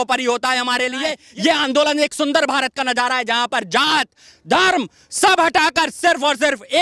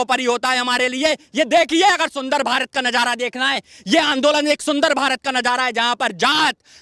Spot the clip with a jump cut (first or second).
first